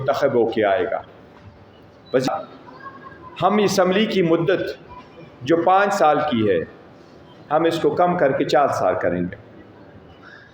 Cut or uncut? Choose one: cut